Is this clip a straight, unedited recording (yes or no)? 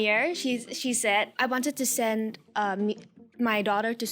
no